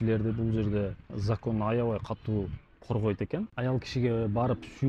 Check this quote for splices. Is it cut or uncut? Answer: uncut